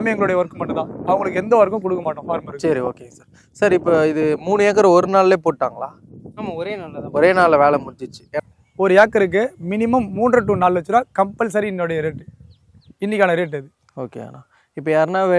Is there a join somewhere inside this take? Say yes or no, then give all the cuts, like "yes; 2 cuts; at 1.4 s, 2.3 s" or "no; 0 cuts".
yes; 1 cut; at 8.4 s